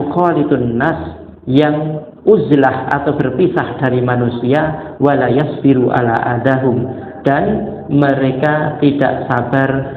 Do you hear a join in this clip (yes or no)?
no